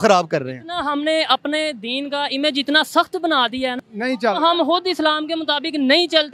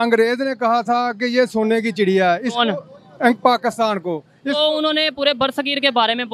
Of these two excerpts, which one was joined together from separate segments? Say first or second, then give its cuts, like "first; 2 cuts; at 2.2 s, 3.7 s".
first; 1 cut; at 3.8 s